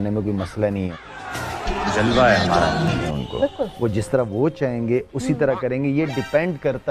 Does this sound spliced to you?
yes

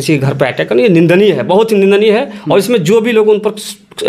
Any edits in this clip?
no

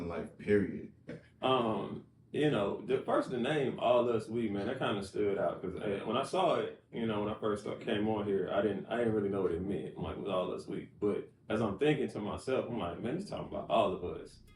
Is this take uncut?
no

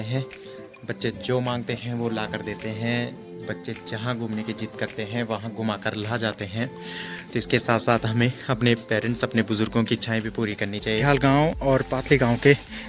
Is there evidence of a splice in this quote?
yes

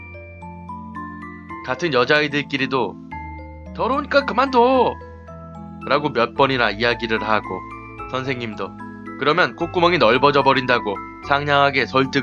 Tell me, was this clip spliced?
no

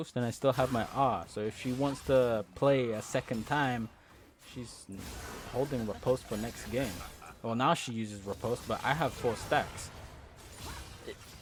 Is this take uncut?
yes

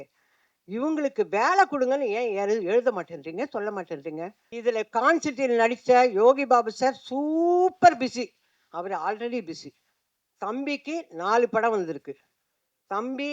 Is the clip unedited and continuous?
no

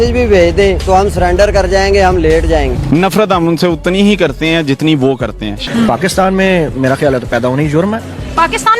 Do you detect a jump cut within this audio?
yes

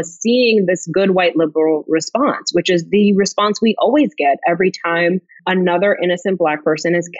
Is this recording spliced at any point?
yes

